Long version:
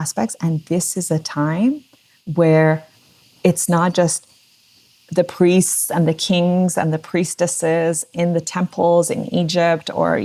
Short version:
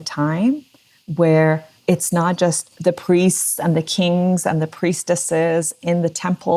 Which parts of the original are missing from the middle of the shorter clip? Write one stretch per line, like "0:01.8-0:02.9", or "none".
0:02.9-0:03.3
0:04.2-0:05.0